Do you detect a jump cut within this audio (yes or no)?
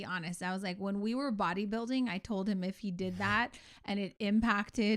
no